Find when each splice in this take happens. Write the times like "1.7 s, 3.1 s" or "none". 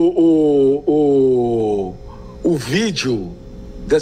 none